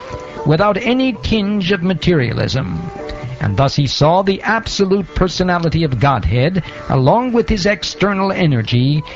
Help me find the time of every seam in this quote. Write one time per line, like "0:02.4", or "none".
0:04.2